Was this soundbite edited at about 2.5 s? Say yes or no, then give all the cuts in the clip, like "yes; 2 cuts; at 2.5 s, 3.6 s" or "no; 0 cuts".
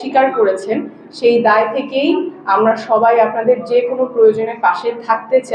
no; 0 cuts